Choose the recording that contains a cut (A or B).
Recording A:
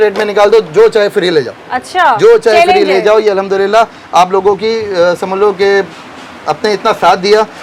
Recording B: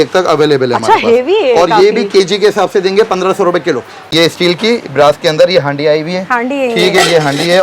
B